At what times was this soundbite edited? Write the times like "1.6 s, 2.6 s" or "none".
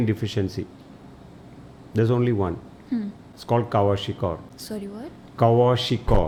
none